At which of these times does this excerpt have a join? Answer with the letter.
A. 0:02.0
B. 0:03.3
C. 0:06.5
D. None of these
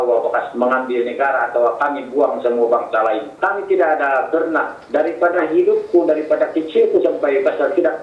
B